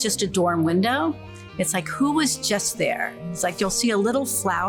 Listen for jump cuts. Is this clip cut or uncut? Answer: uncut